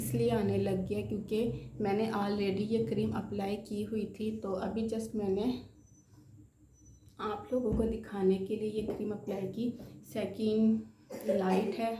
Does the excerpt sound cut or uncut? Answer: uncut